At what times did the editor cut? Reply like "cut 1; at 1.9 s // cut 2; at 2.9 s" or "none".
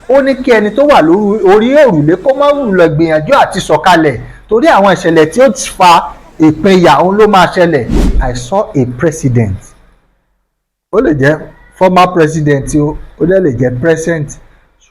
cut 1; at 8.0 s